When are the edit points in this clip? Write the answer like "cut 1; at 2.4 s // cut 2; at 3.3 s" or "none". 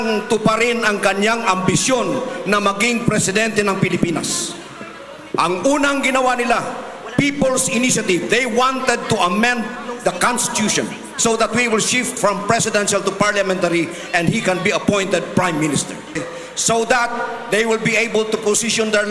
cut 1; at 16.2 s